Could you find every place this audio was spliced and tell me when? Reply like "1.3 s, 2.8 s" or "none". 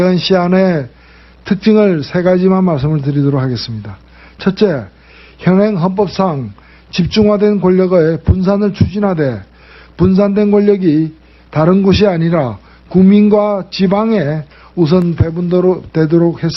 9.9 s